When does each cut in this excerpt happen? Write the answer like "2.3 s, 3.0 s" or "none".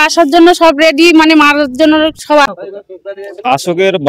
2.5 s